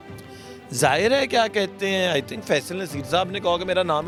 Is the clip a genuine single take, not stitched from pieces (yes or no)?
yes